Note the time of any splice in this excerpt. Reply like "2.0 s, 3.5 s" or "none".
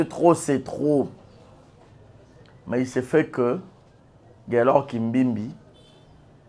none